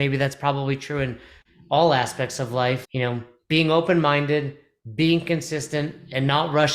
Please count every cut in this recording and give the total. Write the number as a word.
one